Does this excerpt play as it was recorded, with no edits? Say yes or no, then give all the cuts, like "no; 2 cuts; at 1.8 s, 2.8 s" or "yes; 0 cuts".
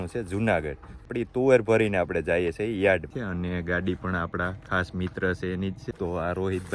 no; 2 cuts; at 1.1 s, 3.1 s